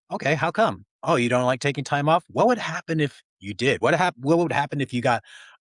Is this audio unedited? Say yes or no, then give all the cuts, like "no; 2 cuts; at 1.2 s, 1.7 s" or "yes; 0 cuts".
yes; 0 cuts